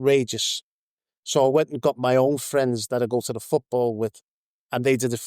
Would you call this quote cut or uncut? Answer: uncut